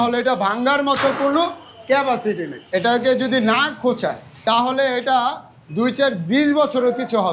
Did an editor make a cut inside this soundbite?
yes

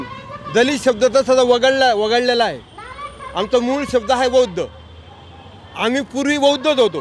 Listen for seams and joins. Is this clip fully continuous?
yes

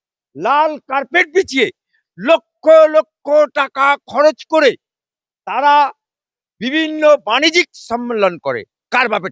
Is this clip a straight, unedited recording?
yes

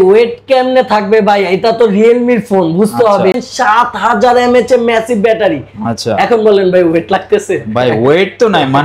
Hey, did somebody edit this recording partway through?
yes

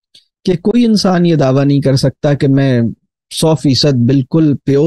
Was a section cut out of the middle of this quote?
no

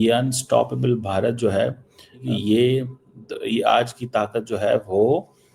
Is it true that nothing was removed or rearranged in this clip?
no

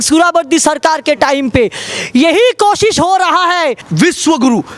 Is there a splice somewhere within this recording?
yes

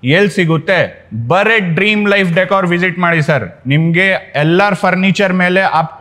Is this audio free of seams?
yes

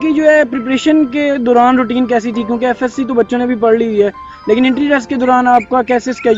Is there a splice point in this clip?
no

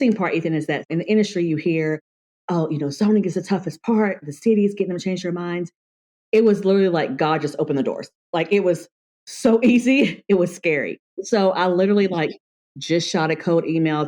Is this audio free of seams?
no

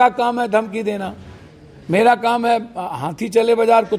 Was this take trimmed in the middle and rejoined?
no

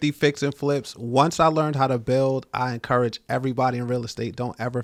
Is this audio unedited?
yes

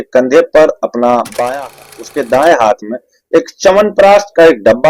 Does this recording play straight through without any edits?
no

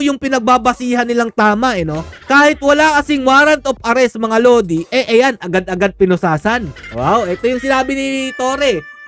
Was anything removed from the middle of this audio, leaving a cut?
no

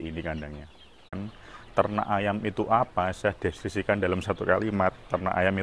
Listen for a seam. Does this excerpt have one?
yes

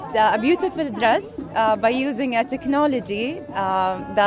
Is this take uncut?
yes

